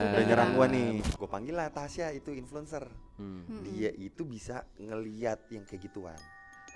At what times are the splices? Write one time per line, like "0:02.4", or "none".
0:01.0